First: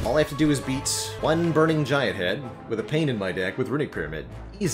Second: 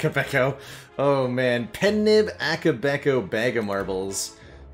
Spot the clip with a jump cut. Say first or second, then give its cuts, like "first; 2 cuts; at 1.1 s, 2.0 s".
first; 1 cut; at 1.0 s